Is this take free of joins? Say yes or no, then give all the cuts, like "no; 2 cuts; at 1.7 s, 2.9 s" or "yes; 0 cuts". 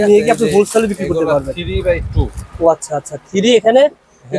yes; 0 cuts